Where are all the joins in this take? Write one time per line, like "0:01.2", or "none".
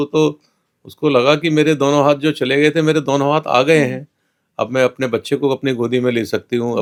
none